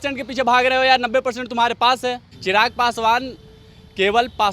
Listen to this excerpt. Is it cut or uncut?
cut